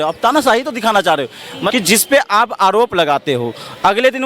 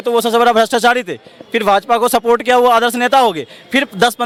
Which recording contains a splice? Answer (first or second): first